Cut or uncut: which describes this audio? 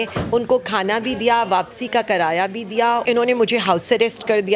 cut